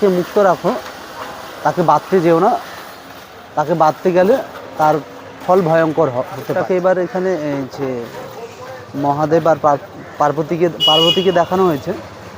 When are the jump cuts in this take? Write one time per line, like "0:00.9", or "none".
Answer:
0:06.6